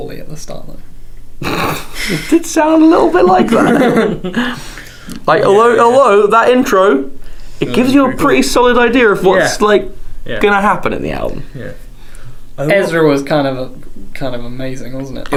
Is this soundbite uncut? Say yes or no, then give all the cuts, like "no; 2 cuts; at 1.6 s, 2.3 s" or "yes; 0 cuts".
yes; 0 cuts